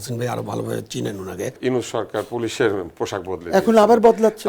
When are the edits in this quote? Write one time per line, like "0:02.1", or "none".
0:01.6